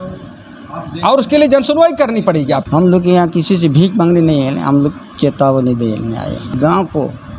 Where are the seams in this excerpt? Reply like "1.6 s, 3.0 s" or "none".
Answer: 2.6 s, 6.5 s

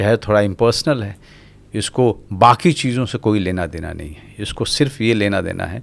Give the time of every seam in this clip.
none

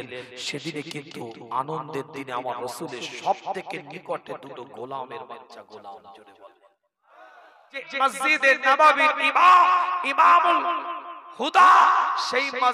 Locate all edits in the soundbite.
7.8 s

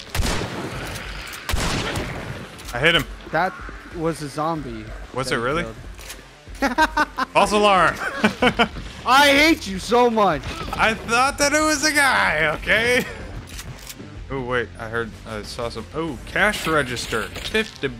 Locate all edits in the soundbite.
none

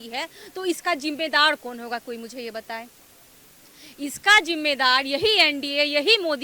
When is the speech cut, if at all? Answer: none

